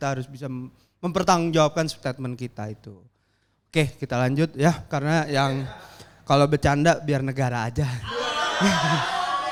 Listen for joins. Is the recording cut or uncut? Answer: uncut